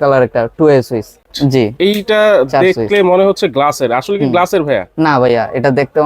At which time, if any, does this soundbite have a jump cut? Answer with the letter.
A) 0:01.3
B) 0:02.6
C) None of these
A